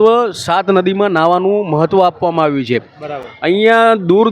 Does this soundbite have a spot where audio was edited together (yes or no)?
no